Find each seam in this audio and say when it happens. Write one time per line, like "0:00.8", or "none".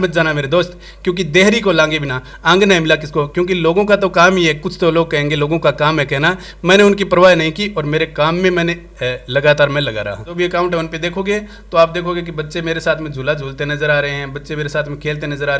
0:10.3